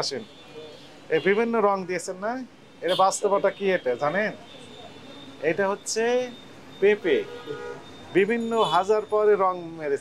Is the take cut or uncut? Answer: uncut